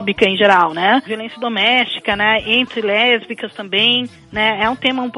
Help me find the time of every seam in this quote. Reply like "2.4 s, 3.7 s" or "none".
1.2 s